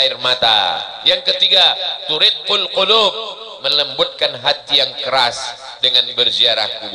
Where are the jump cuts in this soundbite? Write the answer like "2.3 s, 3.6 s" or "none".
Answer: none